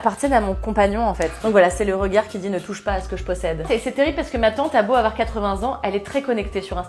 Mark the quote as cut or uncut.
cut